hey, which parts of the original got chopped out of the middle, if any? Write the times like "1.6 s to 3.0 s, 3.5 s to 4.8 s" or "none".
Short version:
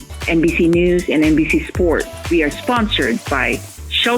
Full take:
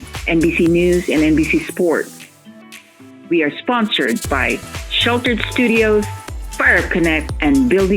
2.1 s to 3.1 s